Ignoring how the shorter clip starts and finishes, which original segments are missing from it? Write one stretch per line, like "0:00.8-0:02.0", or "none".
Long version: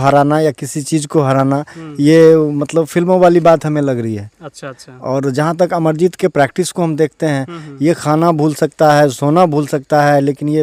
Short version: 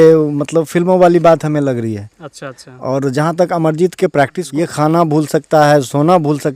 0:06.6-0:07.7